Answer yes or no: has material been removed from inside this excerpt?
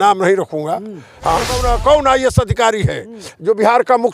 yes